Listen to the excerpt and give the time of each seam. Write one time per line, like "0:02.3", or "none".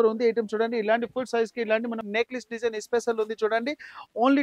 0:02.0